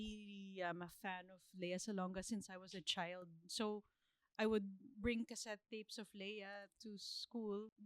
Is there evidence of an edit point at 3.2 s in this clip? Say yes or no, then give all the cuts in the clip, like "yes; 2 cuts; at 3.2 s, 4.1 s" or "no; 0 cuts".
no; 0 cuts